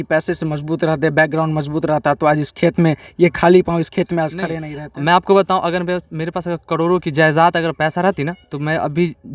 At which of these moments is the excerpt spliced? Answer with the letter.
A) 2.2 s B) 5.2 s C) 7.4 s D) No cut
D